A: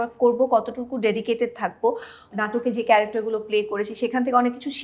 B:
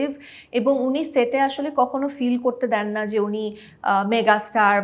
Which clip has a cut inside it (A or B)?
A